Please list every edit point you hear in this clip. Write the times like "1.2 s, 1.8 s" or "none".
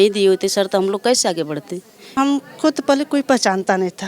2.1 s